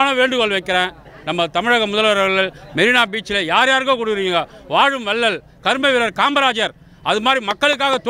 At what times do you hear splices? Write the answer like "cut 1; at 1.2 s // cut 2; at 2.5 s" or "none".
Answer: none